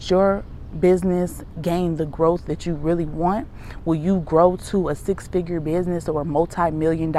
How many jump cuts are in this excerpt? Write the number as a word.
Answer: zero